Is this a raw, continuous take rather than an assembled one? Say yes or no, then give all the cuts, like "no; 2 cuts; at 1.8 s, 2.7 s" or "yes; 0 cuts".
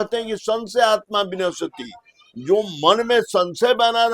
yes; 0 cuts